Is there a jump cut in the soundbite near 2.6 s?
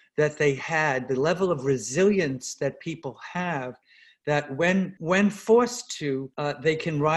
no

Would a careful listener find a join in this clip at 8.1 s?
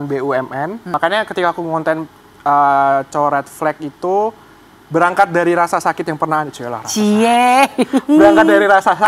no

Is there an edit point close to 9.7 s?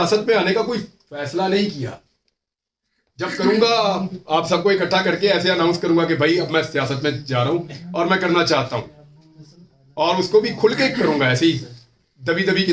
no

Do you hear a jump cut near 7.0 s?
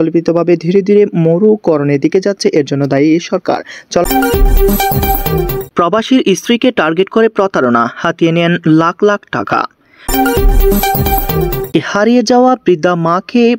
no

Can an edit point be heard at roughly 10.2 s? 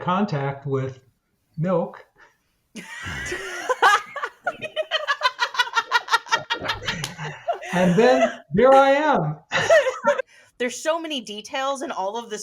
yes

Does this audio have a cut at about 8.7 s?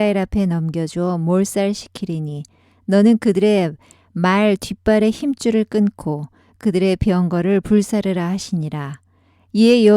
yes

